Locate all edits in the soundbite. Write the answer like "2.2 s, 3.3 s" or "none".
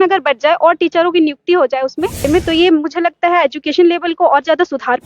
2.3 s